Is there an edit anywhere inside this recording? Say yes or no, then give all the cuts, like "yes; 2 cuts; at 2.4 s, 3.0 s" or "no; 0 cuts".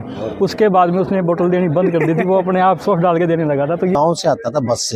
yes; 1 cut; at 3.9 s